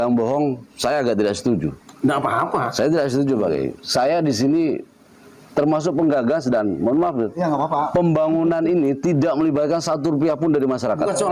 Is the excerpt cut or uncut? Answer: uncut